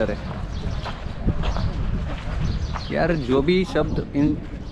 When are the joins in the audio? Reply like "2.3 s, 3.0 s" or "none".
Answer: none